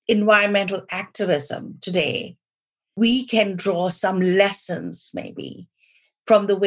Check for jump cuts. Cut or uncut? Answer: cut